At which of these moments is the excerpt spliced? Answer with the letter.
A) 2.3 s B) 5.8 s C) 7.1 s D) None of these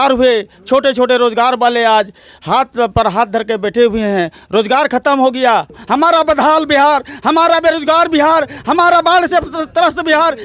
B